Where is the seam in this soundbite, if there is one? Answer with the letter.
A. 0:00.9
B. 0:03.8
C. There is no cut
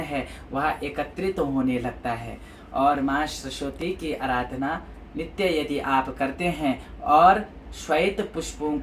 C